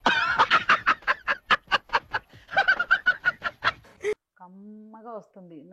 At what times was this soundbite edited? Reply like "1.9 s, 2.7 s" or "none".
4.3 s